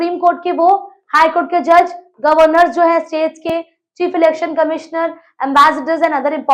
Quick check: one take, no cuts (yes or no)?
yes